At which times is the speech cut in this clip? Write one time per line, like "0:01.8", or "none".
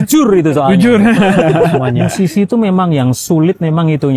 0:02.0